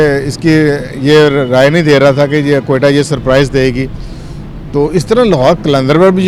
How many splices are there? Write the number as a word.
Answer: zero